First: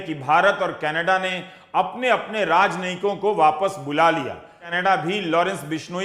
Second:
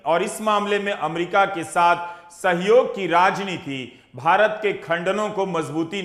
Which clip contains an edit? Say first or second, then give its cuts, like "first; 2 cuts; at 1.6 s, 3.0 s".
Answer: first; 1 cut; at 4.6 s